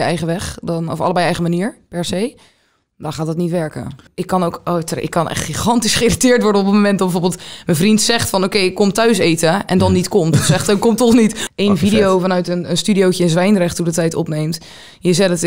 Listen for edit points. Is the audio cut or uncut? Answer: cut